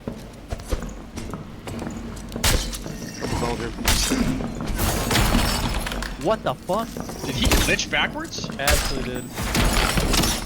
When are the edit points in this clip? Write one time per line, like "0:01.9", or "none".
none